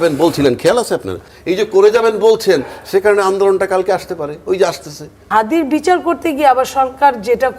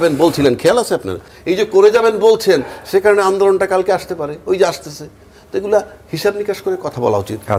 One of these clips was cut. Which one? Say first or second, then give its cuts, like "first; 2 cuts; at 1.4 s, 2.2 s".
first; 1 cut; at 5.3 s